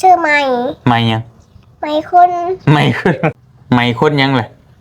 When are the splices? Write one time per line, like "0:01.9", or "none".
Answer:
0:03.5